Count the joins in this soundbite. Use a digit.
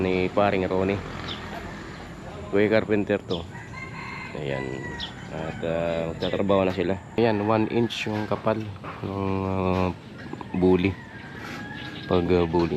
1